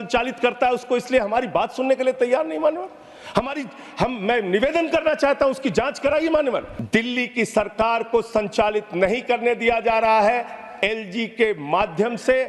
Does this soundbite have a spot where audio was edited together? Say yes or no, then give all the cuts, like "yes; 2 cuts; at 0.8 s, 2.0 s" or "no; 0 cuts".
yes; 1 cut; at 6.7 s